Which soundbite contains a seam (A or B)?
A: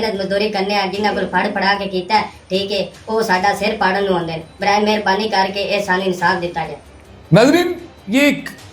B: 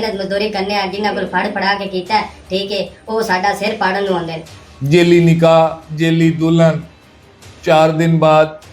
B